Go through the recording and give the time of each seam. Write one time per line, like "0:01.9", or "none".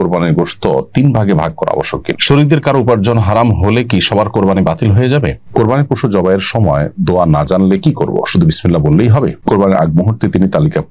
0:02.1
0:05.4
0:09.4